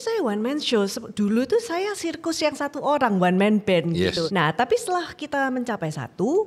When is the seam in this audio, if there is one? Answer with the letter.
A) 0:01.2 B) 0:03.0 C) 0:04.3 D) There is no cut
C